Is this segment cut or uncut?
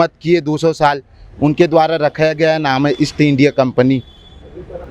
uncut